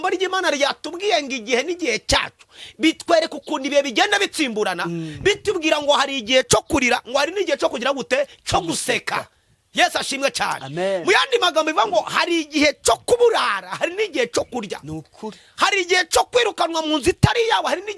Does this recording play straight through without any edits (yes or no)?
yes